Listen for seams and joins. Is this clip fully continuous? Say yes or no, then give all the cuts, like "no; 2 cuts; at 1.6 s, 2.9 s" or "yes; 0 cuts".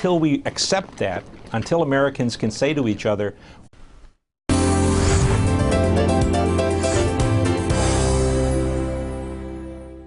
yes; 0 cuts